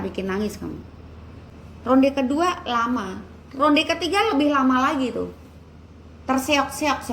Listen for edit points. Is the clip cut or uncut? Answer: cut